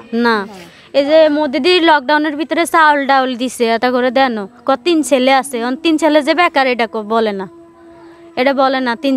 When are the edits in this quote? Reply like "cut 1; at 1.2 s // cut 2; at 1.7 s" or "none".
none